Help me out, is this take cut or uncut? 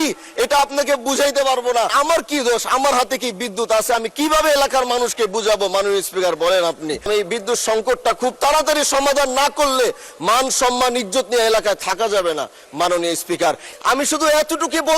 cut